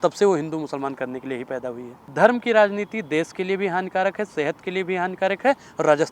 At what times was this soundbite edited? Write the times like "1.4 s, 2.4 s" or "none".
2.0 s

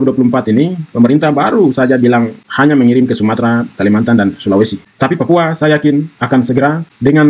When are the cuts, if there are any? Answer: none

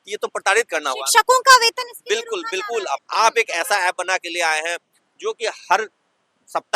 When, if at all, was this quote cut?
3.0 s

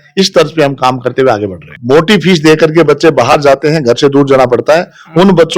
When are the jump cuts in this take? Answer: 1.7 s

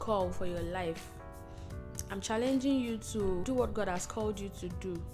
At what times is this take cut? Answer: 3.4 s

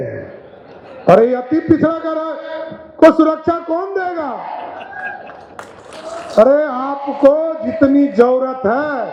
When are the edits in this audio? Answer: none

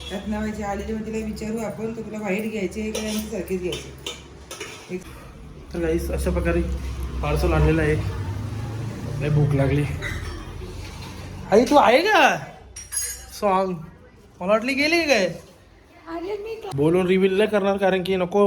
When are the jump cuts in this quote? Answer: 5.0 s, 16.7 s

